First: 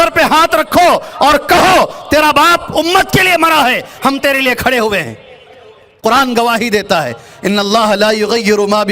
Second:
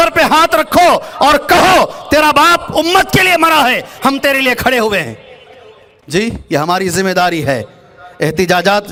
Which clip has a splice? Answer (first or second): first